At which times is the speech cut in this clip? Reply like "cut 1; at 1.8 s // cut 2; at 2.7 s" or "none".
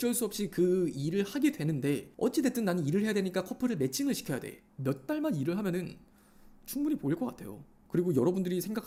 none

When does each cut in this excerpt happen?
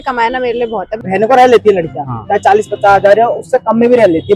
cut 1; at 0.9 s

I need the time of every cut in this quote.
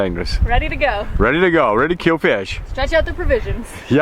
none

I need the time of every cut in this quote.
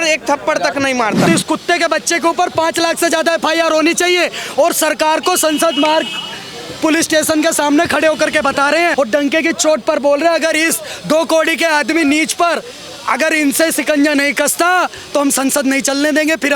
cut 1; at 1.3 s // cut 2; at 8.9 s

